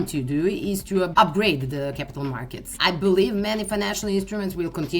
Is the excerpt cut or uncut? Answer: cut